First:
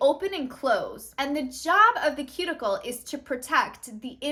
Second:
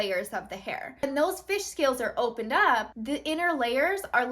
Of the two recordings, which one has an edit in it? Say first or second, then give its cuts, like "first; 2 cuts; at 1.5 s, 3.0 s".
second; 2 cuts; at 0.9 s, 2.9 s